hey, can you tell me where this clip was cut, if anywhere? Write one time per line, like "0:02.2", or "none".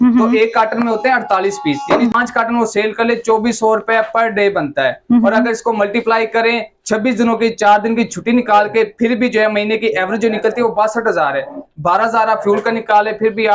0:02.1

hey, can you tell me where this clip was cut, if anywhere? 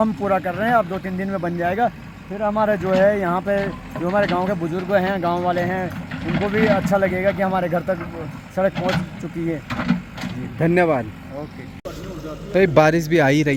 none

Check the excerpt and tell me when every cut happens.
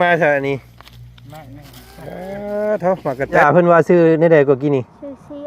0:03.4

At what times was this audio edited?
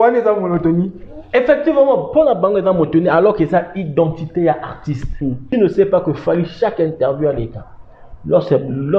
0:05.4

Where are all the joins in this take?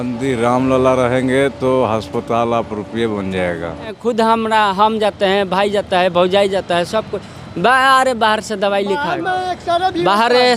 0:04.0

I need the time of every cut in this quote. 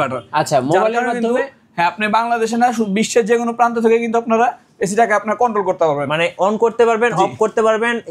none

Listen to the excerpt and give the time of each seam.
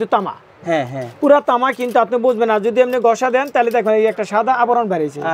none

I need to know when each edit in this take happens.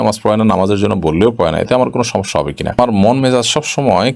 0:02.8

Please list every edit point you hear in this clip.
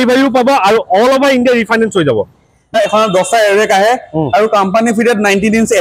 0:02.7

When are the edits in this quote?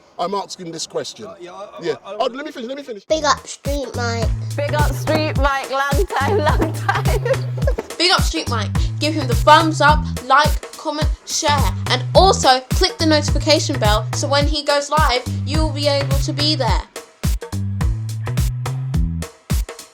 0:02.9

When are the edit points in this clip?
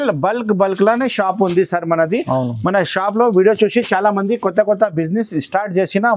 none

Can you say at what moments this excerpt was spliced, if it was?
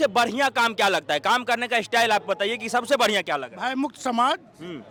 none

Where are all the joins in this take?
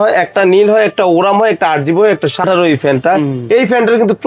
0:02.4

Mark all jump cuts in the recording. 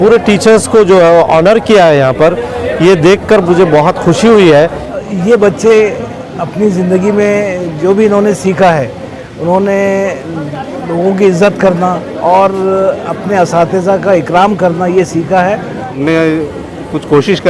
0:05.0
0:16.0

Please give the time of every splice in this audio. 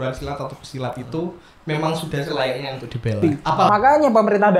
0:03.7

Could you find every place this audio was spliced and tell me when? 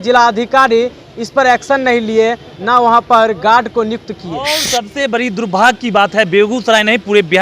0:04.5

